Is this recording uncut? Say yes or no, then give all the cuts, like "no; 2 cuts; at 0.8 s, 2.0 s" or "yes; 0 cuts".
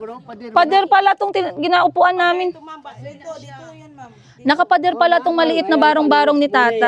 yes; 0 cuts